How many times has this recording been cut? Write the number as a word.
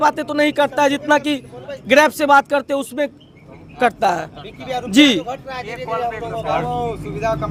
zero